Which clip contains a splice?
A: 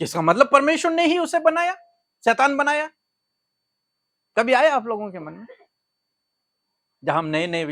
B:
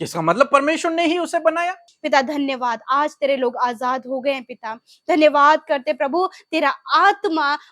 B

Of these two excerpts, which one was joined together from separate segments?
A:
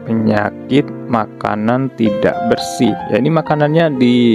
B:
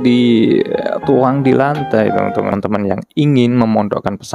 B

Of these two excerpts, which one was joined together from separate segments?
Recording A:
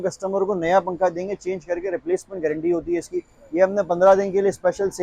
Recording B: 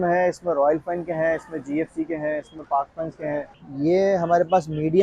B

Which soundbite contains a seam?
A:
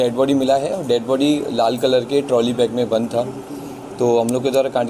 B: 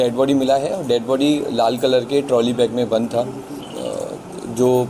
B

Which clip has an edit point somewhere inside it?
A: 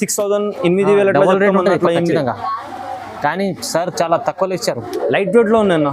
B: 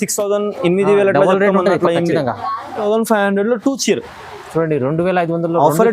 B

